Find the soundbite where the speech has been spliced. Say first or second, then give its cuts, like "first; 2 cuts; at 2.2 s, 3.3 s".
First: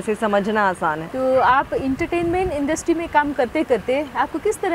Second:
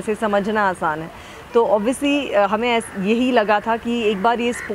first; 1 cut; at 1.1 s